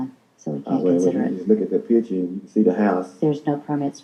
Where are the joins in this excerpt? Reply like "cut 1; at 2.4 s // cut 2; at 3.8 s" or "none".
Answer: none